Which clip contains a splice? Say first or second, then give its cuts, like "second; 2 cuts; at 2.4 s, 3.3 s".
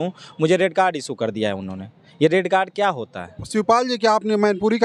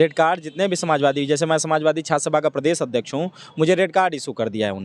first; 1 cut; at 3.4 s